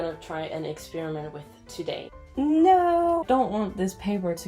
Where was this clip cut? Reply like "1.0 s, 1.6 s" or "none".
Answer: 2.2 s, 3.2 s